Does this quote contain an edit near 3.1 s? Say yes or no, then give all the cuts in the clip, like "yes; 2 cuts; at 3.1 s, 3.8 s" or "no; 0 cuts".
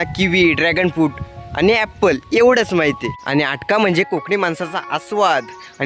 yes; 1 cut; at 3.1 s